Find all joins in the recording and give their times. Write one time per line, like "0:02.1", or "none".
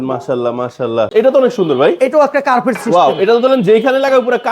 0:01.1